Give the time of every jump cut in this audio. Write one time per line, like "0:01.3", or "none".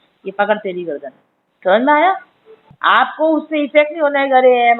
0:02.7